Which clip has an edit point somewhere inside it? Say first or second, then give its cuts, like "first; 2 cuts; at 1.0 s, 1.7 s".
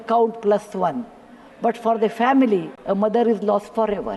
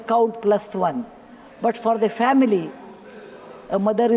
first; 1 cut; at 2.7 s